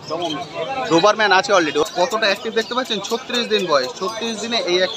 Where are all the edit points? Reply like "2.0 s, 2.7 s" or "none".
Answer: 1.8 s